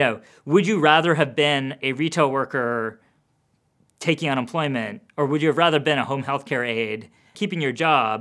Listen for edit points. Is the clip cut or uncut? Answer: cut